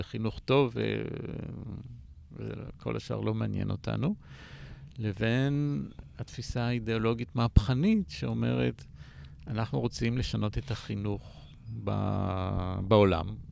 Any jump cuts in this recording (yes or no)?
no